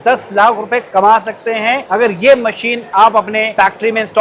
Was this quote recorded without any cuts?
yes; 0 cuts

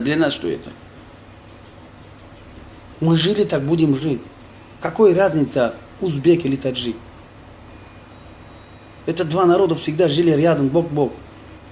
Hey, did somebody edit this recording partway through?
no; 0 cuts

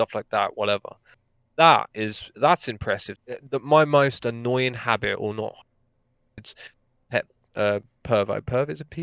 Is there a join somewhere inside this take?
yes; 1 cut; at 3.2 s

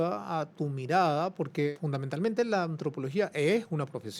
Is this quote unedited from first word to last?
no; 1 cut; at 1.7 s

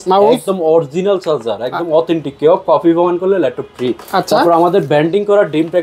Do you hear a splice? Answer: no; 0 cuts

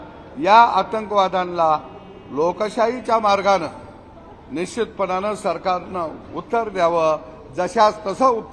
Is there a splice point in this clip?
no; 0 cuts

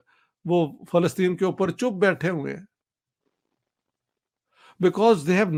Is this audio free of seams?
yes; 0 cuts

